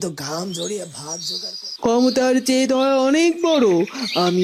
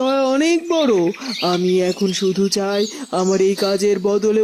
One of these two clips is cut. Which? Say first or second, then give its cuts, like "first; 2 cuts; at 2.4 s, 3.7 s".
first; 1 cut; at 1.8 s